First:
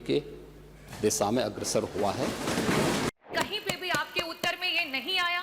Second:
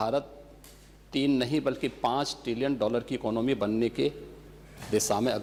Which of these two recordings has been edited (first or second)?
first